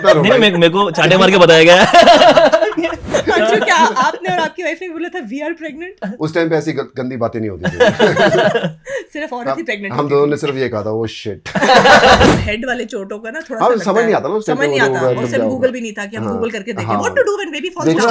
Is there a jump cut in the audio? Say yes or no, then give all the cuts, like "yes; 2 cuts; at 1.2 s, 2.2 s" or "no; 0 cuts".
yes; 3 cuts; at 3.0 s, 6.1 s, 12.3 s